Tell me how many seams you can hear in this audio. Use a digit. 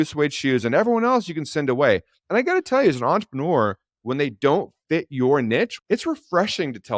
1